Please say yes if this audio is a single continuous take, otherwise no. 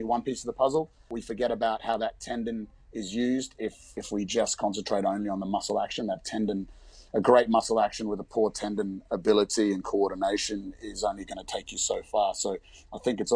no